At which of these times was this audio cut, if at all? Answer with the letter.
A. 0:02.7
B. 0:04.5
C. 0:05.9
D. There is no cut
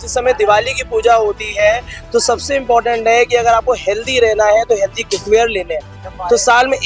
D